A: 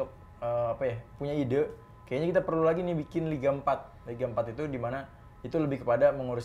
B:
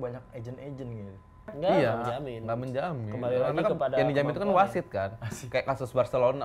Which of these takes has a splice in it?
B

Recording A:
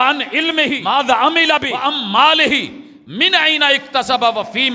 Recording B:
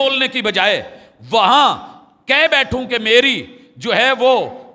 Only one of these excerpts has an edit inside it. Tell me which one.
A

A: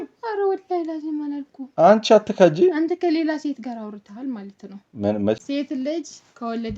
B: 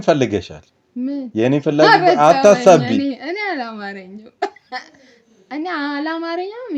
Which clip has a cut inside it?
A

